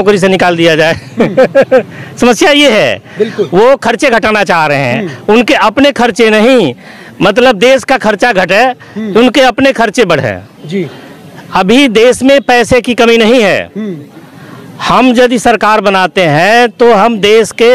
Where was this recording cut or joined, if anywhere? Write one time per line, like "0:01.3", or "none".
none

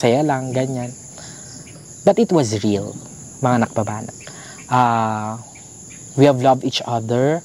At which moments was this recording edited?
none

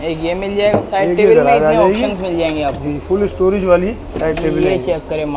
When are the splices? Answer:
none

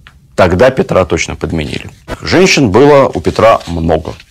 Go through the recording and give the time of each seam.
0:02.0

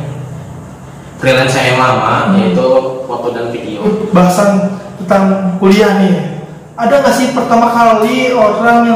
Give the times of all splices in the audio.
0:03.8

